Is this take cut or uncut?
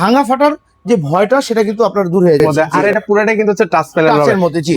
cut